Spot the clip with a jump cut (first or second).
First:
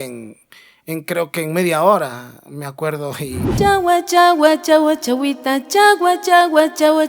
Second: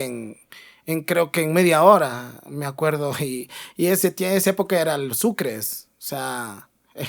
first